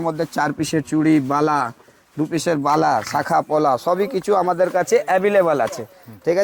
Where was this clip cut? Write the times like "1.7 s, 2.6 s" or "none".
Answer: none